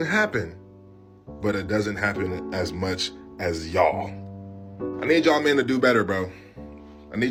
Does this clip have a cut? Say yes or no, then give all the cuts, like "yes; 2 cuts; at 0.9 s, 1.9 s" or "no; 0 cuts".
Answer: no; 0 cuts